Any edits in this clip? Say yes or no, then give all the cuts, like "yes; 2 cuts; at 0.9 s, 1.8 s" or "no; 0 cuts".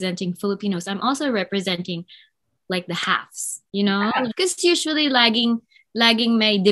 yes; 1 cut; at 4.3 s